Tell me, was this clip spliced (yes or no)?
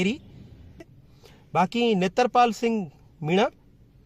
yes